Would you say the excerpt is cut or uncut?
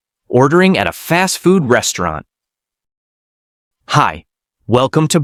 uncut